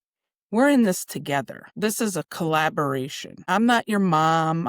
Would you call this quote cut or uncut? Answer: cut